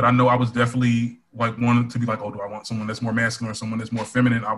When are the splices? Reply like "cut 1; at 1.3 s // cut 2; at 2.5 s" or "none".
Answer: none